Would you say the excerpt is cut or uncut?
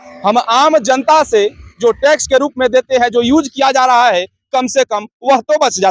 uncut